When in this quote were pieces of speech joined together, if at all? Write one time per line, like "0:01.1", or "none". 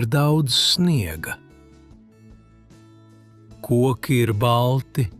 0:01.4
0:03.0